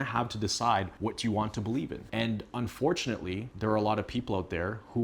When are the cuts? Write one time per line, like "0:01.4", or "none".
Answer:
0:00.9
0:02.0
0:03.5